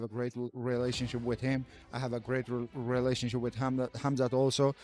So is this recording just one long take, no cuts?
yes; 0 cuts

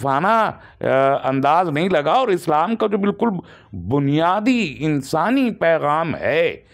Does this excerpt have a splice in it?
no; 0 cuts

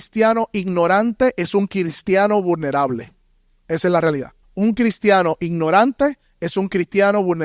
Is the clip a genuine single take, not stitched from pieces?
no; 1 cut; at 4.4 s

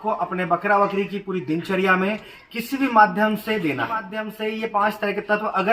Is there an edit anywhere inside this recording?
yes; 1 cut; at 4.2 s

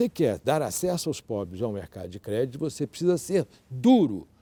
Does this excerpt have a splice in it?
no; 0 cuts

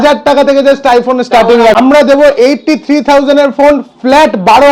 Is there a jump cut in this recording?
yes; 1 cut; at 1.8 s

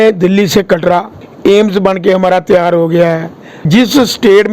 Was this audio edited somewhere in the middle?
yes; 1 cut; at 1.2 s

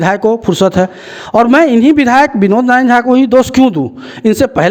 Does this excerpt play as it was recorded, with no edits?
yes; 0 cuts

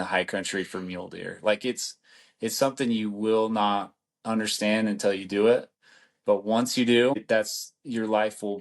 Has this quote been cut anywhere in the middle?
yes; 1 cut; at 7.2 s

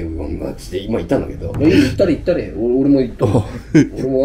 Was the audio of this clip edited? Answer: yes; 1 cut; at 1.5 s

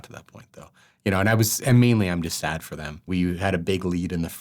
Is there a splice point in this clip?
yes; 1 cut; at 3.1 s

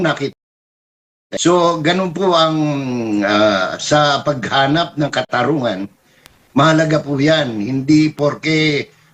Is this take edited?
no; 0 cuts

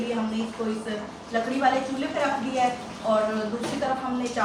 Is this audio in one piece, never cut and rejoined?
yes; 0 cuts

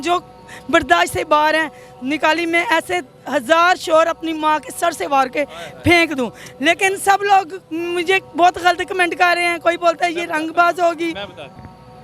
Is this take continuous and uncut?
yes; 0 cuts

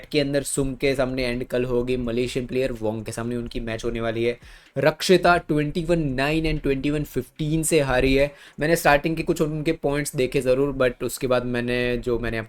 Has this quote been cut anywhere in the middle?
no; 0 cuts

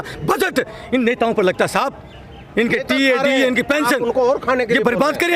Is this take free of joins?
yes; 0 cuts

